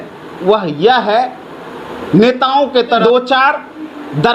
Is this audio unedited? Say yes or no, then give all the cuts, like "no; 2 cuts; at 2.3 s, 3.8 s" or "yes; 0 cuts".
no; 1 cut; at 3.0 s